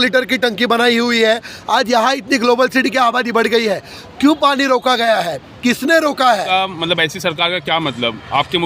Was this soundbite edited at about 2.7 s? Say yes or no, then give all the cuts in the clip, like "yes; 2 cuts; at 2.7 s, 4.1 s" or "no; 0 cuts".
no; 1 cut; at 6.4 s